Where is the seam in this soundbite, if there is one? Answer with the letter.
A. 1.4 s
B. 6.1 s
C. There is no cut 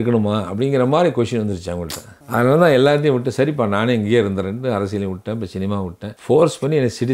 B